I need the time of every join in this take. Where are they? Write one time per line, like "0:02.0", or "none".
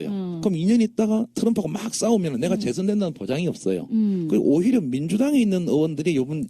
0:03.6